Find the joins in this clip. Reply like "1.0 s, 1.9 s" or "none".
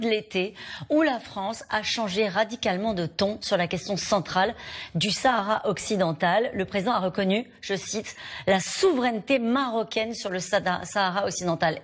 none